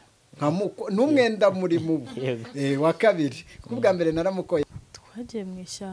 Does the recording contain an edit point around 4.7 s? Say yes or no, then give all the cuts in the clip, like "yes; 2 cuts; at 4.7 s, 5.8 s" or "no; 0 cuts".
yes; 1 cut; at 4.7 s